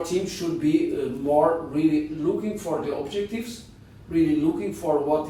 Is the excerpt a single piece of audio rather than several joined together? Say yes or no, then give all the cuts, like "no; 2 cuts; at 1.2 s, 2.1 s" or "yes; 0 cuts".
yes; 0 cuts